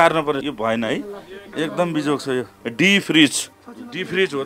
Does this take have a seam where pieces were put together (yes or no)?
yes